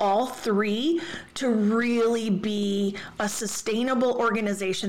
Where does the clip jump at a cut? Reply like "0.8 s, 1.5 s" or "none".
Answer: none